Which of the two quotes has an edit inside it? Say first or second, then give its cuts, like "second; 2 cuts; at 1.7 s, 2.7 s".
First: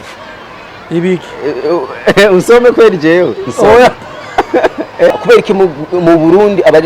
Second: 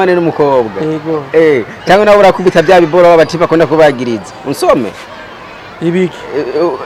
first; 1 cut; at 5.2 s